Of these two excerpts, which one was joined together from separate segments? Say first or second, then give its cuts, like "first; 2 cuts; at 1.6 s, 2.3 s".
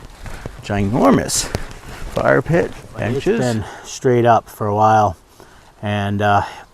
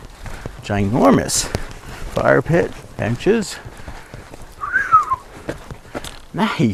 first; 1 cut; at 3.4 s